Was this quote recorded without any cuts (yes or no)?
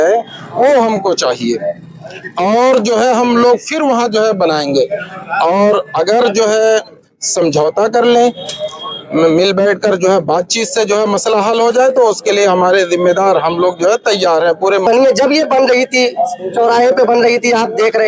no